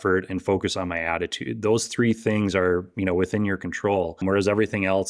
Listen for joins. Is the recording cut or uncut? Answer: cut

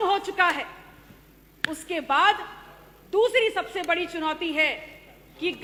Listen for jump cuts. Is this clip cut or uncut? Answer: uncut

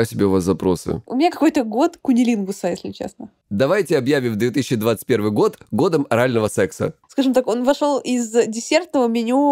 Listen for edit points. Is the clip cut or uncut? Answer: cut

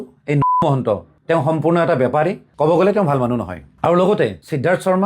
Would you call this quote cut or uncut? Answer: cut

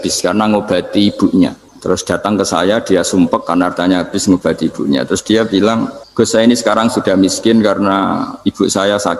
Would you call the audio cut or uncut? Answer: cut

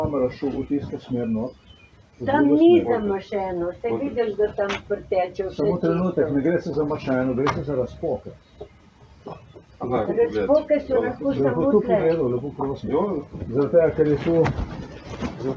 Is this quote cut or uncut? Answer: cut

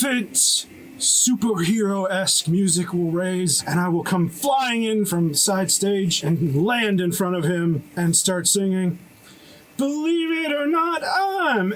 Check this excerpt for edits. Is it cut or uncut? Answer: cut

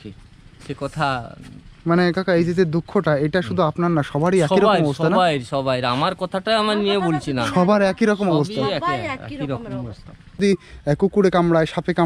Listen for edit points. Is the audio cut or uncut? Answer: cut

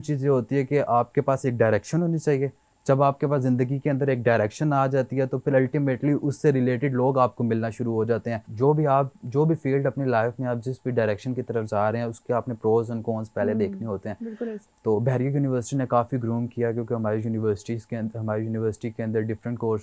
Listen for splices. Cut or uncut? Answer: cut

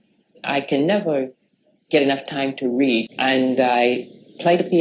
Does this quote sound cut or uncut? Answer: cut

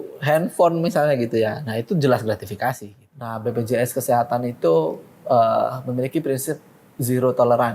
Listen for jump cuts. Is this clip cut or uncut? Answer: cut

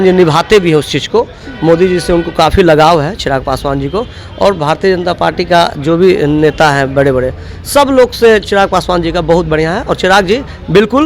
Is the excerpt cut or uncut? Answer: uncut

